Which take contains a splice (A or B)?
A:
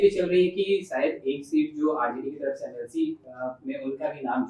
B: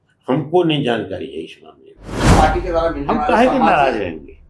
B